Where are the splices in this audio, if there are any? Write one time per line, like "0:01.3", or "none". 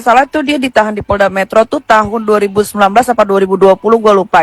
0:01.7